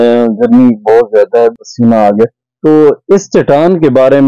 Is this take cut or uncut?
cut